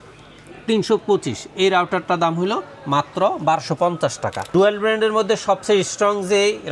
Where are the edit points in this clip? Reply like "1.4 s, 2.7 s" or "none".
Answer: 4.4 s

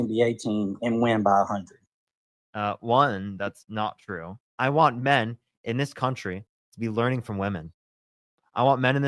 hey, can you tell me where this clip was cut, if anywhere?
4.4 s

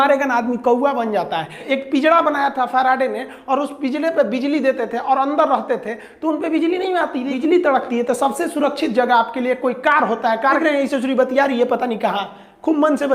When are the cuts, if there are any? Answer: 1.6 s, 7.3 s, 10.6 s

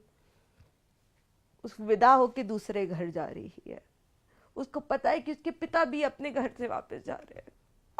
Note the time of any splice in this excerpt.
none

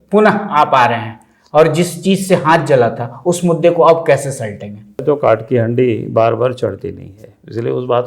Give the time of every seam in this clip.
5.0 s

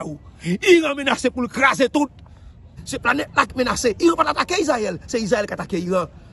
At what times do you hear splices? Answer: 2.7 s

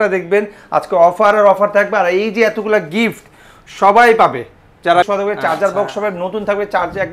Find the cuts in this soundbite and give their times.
5.1 s

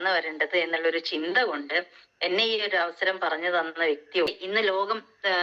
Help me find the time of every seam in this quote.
4.3 s

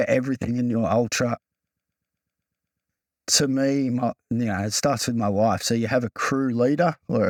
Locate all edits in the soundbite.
none

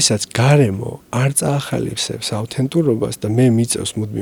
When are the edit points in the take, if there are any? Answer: none

